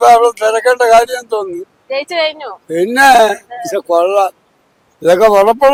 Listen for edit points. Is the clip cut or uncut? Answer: uncut